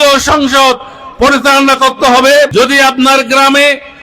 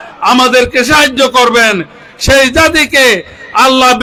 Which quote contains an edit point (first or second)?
first